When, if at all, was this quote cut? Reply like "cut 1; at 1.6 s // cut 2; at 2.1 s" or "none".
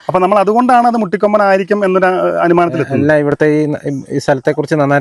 none